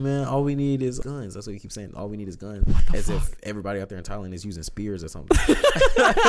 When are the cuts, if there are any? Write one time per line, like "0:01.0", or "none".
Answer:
0:01.0